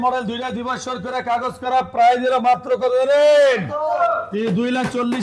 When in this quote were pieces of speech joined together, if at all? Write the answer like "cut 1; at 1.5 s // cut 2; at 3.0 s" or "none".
none